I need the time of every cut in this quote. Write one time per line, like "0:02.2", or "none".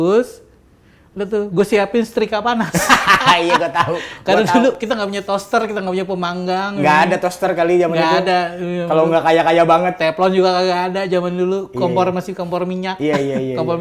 none